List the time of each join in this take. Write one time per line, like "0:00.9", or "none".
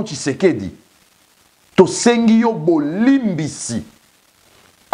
none